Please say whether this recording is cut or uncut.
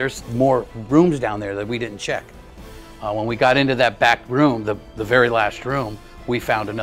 uncut